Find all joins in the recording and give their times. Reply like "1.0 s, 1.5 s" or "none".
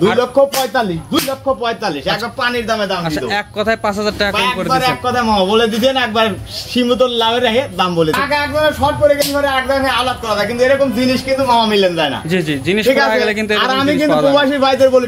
8.2 s